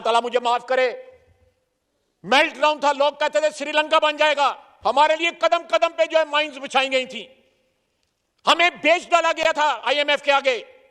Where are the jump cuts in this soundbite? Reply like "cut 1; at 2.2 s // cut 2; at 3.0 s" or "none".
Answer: none